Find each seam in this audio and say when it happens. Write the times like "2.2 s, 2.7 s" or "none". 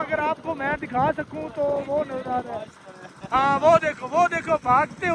none